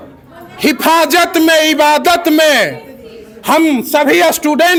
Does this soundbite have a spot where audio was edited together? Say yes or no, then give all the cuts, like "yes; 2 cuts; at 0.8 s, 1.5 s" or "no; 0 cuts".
no; 0 cuts